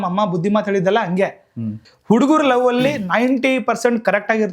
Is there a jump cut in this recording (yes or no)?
yes